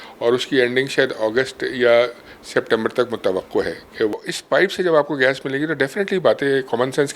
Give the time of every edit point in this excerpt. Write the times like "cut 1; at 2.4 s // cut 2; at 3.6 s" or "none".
cut 1; at 4.1 s